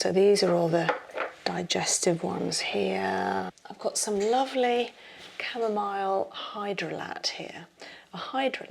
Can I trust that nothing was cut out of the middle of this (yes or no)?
no